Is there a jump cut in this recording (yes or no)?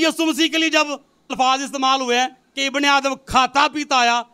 yes